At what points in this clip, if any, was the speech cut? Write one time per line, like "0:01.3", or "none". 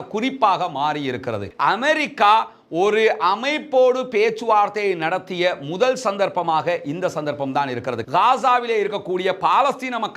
0:01.4
0:08.0